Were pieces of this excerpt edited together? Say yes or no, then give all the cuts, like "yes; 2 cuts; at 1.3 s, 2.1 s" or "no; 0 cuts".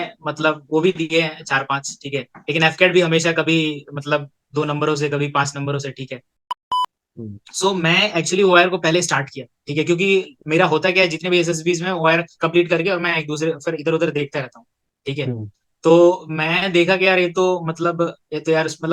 yes; 1 cut; at 6.7 s